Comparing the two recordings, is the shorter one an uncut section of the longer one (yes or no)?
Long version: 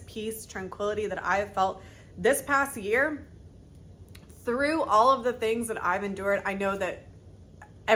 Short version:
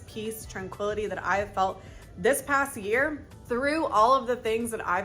no